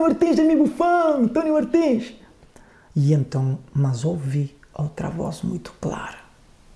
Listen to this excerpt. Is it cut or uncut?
uncut